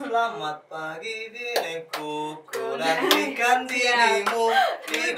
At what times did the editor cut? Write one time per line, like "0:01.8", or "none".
none